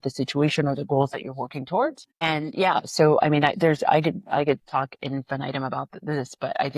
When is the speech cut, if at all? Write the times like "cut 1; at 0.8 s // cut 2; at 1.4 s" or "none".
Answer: cut 1; at 2.1 s